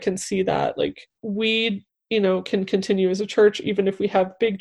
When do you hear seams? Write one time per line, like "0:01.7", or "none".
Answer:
0:01.1